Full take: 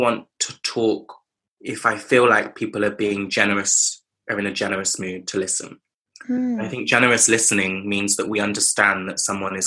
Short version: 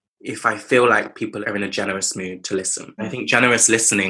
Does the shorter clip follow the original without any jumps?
no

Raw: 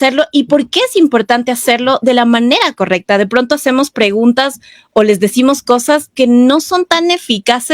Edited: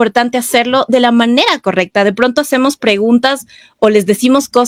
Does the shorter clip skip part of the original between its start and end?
no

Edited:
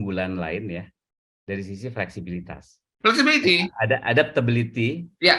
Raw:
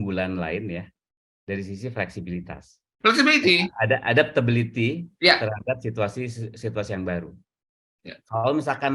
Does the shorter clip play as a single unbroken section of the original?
yes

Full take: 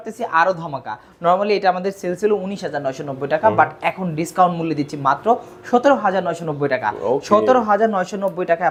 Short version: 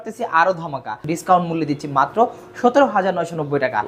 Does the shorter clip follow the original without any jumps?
no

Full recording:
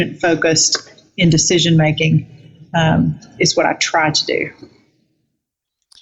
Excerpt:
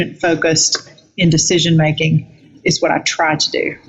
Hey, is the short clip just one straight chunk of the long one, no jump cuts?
no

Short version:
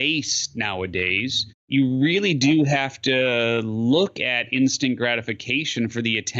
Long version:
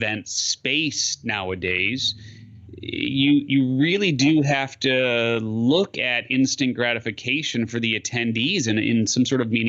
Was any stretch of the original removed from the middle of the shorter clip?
yes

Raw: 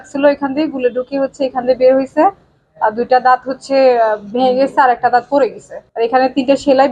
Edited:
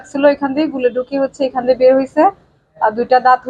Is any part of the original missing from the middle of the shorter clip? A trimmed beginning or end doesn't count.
no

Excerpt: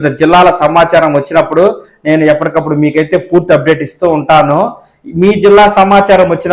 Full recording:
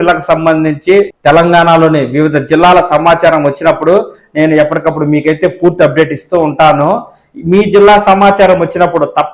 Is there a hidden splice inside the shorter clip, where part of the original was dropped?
no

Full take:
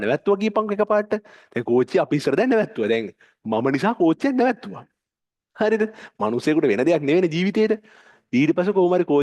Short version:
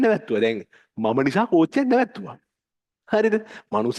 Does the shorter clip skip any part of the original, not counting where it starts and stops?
no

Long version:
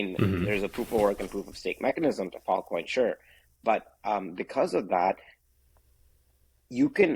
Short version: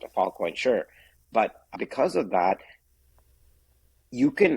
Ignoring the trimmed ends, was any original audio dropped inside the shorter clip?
yes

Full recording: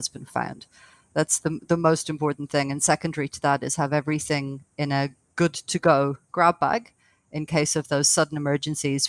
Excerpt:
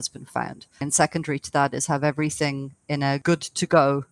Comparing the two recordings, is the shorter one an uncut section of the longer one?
no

